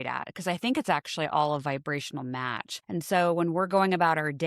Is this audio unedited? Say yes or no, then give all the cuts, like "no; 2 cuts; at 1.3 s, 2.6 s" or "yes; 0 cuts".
no; 1 cut; at 2.7 s